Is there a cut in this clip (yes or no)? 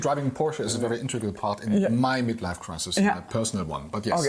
no